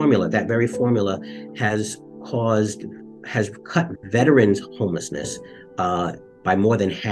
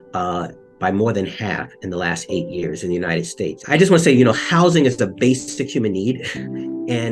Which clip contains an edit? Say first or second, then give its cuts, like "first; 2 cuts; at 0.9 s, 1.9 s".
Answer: second; 1 cut; at 3.6 s